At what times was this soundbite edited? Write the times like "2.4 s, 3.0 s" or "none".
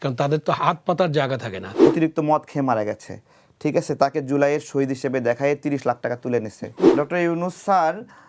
1.6 s, 6.9 s